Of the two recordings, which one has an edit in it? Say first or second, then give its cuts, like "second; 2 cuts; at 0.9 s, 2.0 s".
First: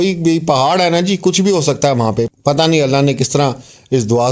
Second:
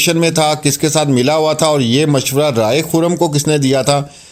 first; 1 cut; at 2.3 s